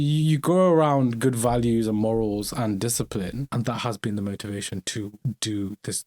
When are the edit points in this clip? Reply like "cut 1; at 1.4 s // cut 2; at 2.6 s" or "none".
cut 1; at 3.4 s // cut 2; at 5.2 s